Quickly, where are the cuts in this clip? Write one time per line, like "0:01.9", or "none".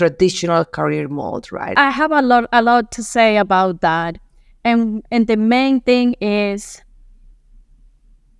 0:01.8